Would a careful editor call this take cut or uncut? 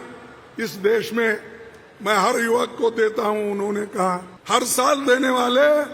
cut